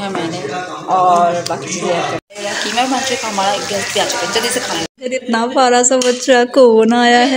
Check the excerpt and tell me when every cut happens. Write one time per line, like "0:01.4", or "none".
0:02.3
0:04.9